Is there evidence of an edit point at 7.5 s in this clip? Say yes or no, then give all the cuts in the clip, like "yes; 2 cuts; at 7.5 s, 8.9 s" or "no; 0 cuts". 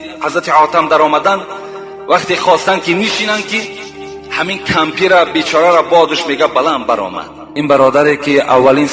yes; 1 cut; at 7.5 s